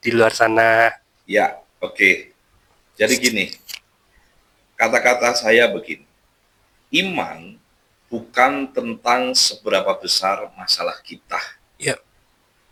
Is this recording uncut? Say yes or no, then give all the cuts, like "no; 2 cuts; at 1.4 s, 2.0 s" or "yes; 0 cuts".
yes; 0 cuts